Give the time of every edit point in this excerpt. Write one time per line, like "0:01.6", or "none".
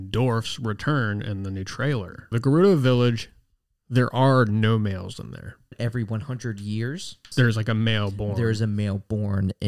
0:02.3
0:05.8
0:07.2